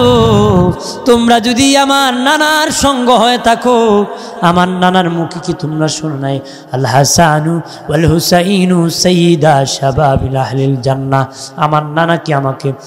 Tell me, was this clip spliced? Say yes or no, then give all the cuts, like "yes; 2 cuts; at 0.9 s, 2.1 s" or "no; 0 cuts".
no; 0 cuts